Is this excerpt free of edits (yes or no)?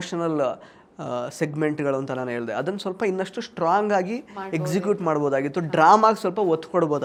yes